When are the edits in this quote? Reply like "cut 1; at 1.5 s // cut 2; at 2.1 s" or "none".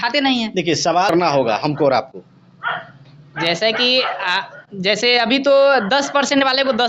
cut 1; at 1.1 s